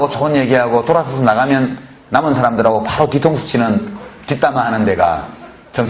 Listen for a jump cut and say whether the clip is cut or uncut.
uncut